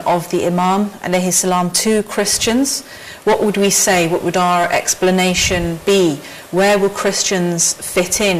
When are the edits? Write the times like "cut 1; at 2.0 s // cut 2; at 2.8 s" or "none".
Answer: cut 1; at 1.6 s